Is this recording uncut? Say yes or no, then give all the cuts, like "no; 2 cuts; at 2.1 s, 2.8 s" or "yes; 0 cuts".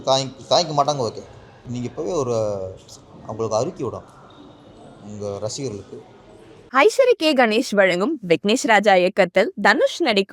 no; 2 cuts; at 1.8 s, 6.6 s